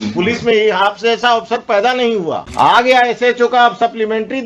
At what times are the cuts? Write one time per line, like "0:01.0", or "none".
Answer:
0:02.4